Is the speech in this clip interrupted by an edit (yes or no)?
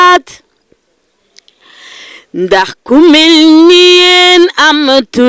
no